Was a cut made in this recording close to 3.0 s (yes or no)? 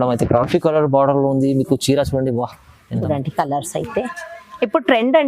yes